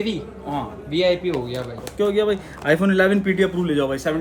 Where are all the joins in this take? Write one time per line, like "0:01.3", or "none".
none

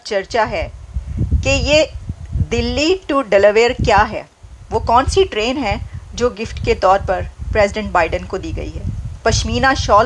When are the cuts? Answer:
none

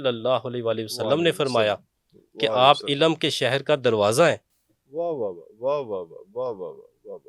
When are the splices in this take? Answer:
none

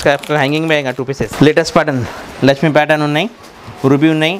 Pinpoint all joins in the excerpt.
0:01.3

